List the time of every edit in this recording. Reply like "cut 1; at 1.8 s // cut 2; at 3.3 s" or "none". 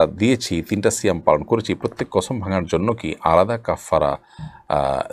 none